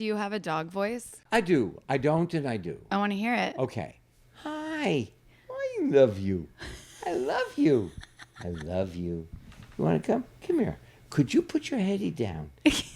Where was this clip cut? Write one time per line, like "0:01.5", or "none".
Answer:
0:01.2